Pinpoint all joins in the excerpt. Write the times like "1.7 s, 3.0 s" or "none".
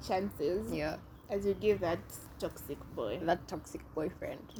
none